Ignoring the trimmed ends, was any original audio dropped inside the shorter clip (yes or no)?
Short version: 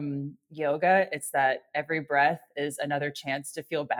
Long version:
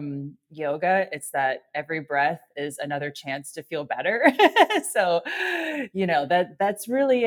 no